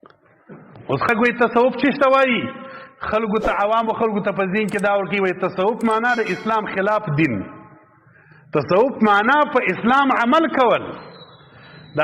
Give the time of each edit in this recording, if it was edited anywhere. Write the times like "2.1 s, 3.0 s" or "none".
1.1 s